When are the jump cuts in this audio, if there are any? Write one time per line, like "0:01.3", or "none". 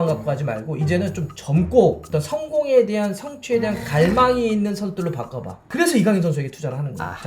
none